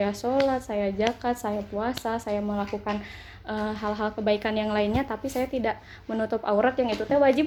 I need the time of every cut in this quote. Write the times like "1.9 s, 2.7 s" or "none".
none